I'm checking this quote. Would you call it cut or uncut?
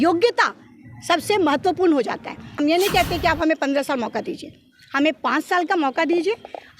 cut